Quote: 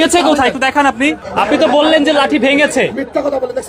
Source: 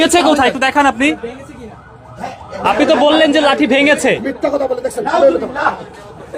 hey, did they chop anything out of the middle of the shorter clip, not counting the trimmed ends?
yes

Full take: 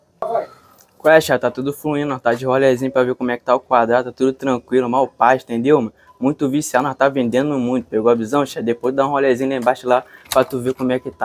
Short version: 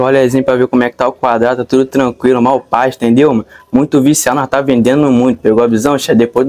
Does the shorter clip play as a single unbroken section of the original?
yes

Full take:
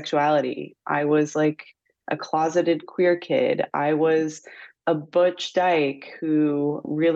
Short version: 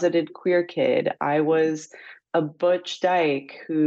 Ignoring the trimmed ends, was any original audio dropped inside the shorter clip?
no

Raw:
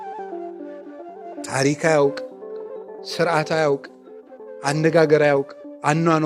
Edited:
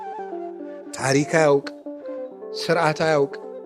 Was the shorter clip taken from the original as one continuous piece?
no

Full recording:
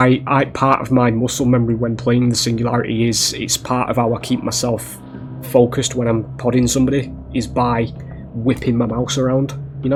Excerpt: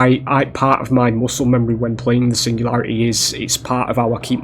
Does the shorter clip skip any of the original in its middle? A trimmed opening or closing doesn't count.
no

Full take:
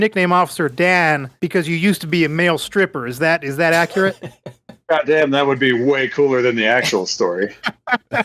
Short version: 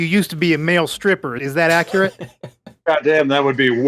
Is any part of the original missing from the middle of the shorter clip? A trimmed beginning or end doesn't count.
yes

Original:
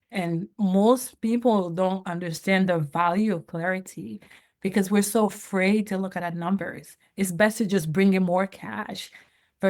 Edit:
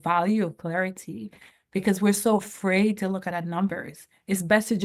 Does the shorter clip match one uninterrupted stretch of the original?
yes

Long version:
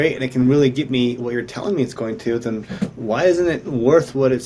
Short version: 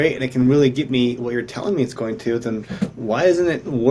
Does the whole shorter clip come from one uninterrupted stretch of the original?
yes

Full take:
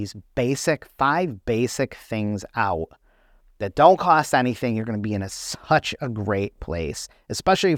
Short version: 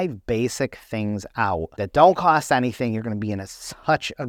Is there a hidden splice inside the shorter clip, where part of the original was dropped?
yes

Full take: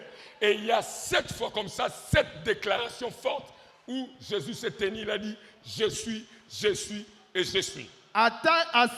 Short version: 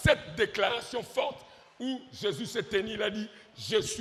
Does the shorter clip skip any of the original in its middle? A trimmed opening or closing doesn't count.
no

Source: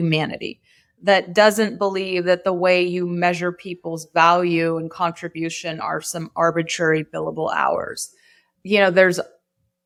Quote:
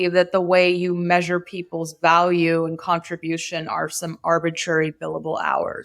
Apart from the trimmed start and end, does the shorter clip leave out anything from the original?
no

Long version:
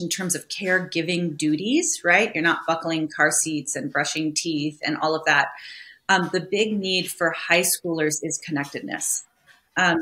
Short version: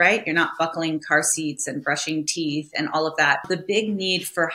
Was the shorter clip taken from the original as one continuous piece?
no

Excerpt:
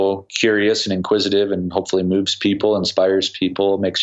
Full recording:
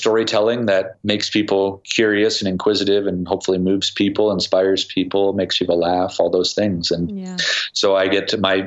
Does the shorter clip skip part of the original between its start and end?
no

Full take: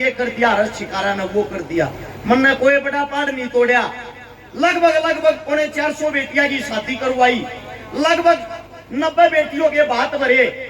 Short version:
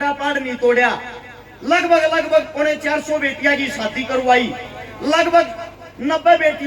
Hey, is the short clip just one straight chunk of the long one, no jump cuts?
yes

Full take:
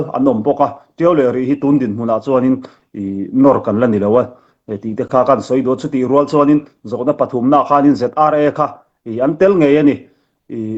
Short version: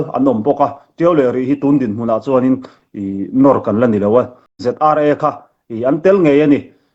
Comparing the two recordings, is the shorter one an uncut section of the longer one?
no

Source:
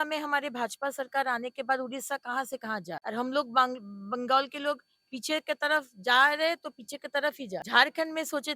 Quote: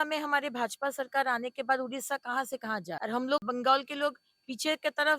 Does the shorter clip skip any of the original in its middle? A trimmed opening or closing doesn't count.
yes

